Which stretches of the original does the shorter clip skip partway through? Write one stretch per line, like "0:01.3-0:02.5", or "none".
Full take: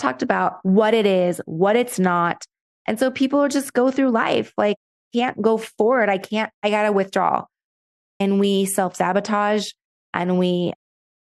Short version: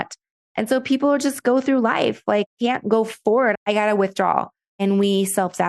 0:04.8-0:05.0
0:06.1-0:06.5
0:07.6-0:08.0